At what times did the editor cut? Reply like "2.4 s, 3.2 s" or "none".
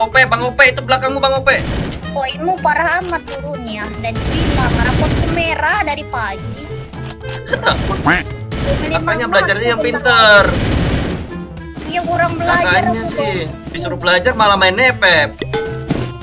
13.7 s